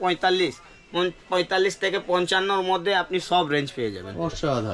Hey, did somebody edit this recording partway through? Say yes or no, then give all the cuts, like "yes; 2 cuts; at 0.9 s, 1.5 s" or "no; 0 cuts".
no; 0 cuts